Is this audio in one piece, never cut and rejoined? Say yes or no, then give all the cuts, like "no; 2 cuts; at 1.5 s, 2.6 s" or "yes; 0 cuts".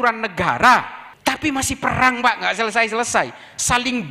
no; 1 cut; at 1.0 s